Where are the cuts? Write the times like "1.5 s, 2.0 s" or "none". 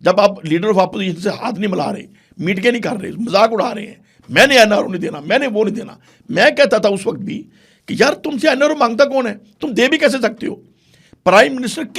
none